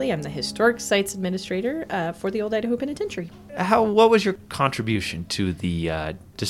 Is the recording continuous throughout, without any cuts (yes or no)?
yes